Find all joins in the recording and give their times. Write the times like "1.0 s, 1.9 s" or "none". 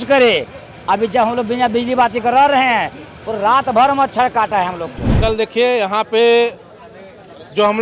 5.2 s

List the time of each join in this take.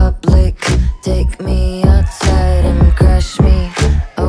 none

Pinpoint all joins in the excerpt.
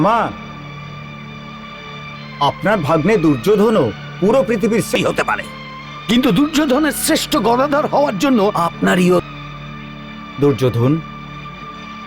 5.0 s, 9.3 s

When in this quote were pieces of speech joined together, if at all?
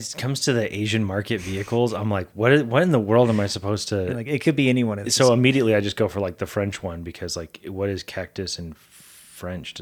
none

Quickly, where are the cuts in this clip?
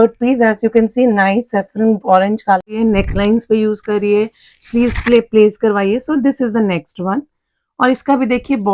2.7 s

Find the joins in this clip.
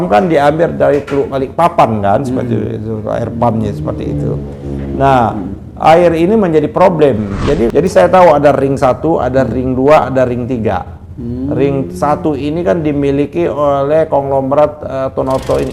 7.7 s

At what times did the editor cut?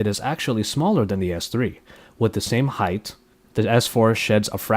1.2 s

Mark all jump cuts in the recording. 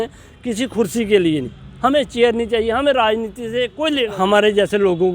4.1 s

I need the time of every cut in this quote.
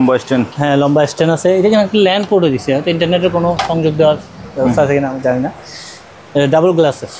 none

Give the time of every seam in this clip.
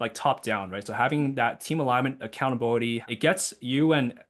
3.0 s

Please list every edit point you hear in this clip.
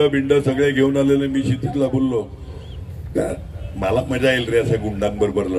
none

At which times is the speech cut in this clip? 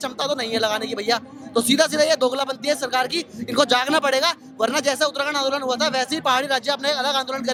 none

